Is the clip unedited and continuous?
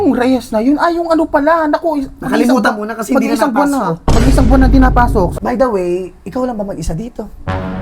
no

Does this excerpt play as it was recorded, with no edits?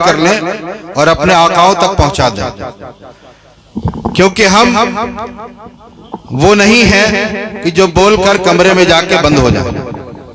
yes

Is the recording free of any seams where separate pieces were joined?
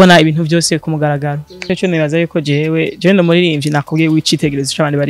no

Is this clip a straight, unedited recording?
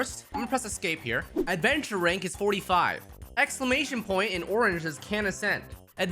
no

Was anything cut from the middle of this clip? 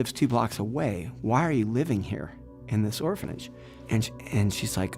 yes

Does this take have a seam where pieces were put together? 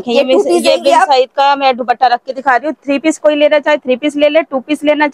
no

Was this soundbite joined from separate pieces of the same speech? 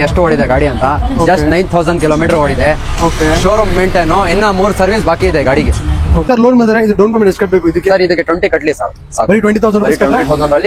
yes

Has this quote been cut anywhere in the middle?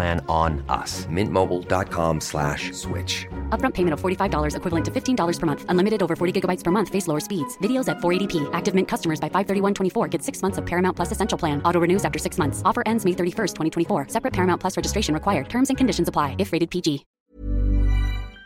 yes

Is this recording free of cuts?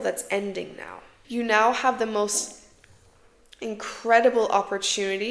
no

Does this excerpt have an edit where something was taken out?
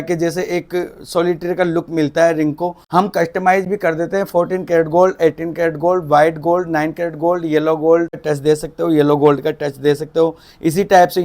yes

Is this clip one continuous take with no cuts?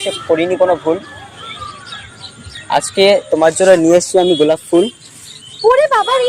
yes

